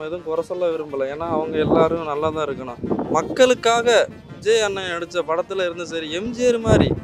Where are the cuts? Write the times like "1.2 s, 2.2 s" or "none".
none